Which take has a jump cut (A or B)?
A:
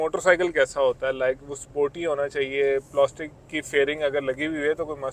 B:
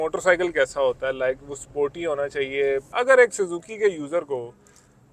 B